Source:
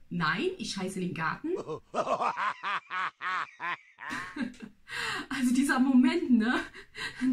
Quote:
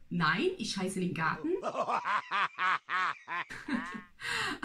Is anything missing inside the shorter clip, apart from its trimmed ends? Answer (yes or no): yes